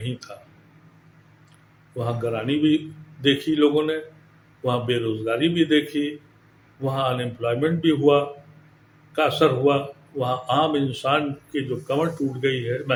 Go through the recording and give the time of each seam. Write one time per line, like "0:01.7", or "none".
none